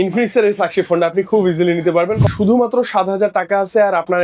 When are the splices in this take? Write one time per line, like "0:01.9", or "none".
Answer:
0:02.3